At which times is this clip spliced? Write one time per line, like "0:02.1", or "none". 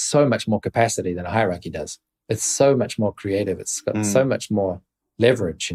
none